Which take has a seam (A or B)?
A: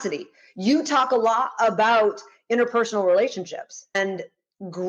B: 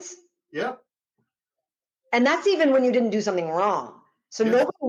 A